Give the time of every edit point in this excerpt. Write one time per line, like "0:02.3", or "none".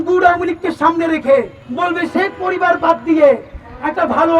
0:01.6

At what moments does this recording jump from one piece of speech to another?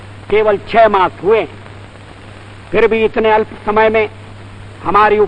none

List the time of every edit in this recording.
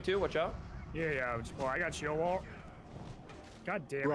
none

